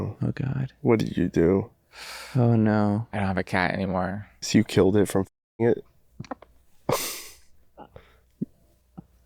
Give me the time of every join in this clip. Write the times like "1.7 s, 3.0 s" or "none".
4.3 s